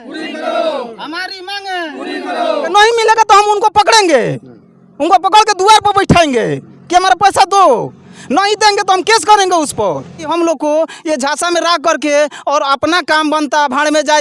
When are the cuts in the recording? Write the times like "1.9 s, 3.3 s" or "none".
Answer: 2.7 s, 10.3 s

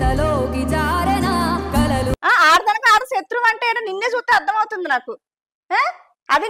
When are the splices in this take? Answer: 2.1 s

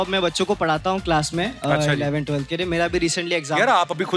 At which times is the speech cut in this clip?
none

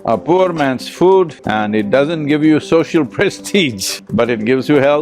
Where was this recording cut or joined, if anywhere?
1.4 s

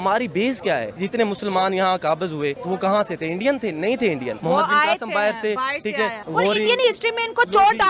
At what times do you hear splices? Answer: 0.9 s, 2.6 s, 4.3 s, 6.2 s

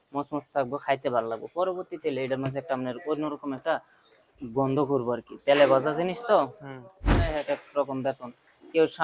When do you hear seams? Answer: 7.0 s

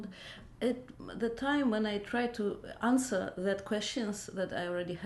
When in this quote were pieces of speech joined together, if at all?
2.1 s

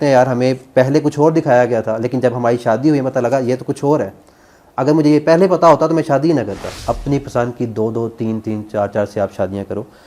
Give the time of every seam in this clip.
6.8 s

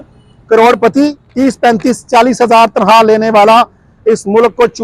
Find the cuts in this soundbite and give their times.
1.2 s

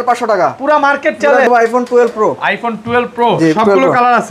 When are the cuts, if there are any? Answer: 1.5 s

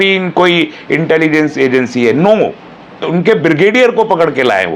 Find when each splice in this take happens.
3.1 s

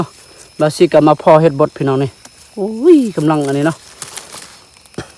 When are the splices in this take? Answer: none

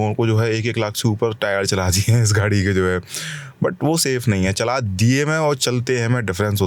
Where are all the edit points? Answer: none

